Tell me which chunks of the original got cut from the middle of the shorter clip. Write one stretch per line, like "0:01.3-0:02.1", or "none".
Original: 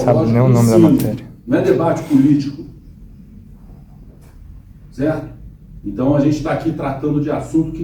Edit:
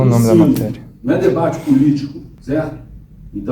0:02.7-0:04.8